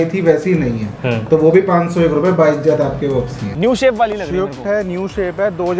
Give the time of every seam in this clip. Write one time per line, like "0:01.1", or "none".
0:03.5